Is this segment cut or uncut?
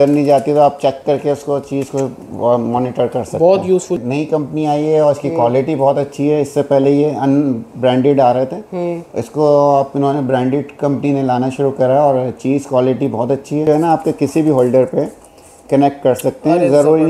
cut